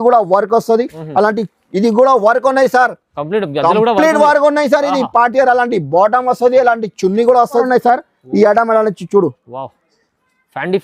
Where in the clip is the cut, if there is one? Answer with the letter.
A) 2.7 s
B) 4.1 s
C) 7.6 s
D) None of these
C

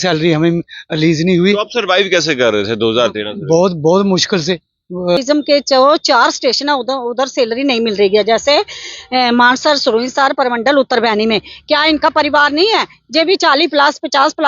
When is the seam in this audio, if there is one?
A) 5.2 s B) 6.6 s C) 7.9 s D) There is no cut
A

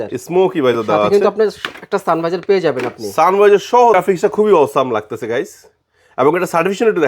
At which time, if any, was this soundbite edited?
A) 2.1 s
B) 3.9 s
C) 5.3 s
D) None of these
B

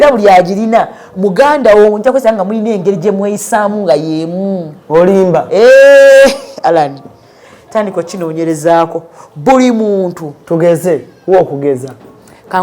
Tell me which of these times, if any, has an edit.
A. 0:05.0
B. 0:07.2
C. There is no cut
C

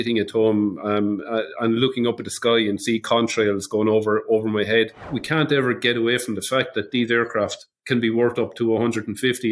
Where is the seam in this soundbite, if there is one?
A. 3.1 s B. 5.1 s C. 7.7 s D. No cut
B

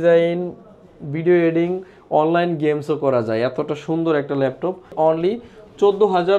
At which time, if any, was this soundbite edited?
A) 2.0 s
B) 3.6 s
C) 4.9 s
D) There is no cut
C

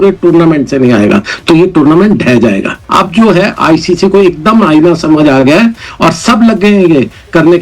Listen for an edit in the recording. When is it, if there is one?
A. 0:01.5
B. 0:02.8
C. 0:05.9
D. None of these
B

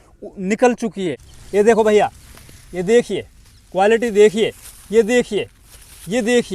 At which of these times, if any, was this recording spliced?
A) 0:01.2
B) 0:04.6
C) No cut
A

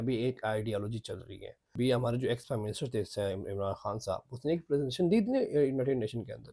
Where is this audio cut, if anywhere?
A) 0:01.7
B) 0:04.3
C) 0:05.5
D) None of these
A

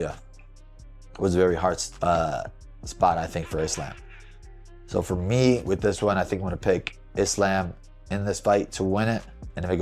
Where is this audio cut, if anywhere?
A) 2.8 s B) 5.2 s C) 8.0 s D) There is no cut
D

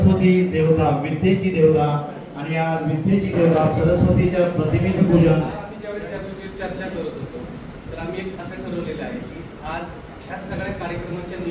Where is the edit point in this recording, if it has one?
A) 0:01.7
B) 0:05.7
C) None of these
B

